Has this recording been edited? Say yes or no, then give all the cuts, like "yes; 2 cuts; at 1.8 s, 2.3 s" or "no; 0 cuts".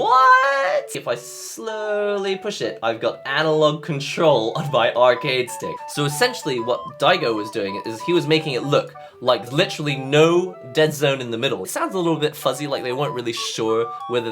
yes; 4 cuts; at 1.0 s, 5.8 s, 9.5 s, 11.7 s